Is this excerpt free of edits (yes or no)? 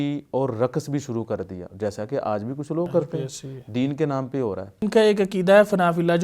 no